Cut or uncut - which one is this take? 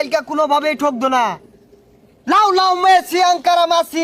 uncut